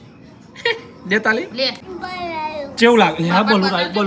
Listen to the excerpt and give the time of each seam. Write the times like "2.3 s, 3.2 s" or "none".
1.8 s